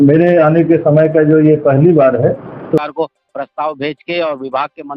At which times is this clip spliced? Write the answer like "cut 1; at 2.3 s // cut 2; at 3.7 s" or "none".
cut 1; at 2.8 s